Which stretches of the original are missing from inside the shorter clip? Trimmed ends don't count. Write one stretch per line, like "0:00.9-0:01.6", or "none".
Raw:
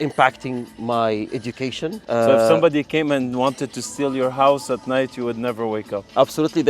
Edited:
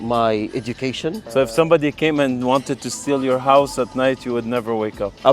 0:02.1-0:02.2